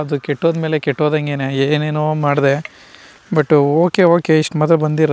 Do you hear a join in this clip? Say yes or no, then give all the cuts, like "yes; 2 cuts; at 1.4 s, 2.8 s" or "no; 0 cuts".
no; 0 cuts